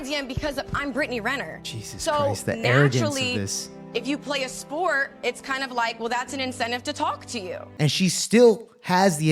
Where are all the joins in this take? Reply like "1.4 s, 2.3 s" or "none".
7.6 s